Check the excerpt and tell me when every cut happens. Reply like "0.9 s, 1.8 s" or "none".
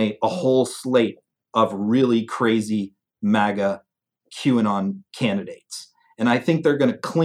none